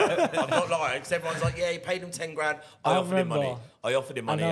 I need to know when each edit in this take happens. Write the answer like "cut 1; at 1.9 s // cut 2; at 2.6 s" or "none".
none